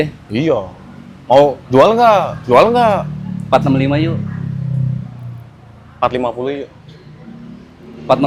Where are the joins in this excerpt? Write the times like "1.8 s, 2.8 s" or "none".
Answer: none